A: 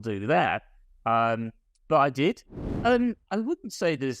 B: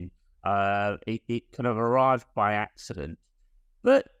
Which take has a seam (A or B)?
A